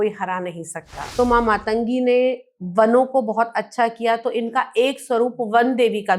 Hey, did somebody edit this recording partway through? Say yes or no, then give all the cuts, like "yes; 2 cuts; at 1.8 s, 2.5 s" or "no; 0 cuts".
yes; 1 cut; at 1.0 s